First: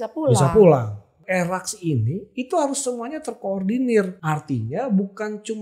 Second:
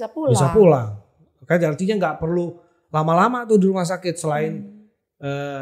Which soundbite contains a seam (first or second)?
first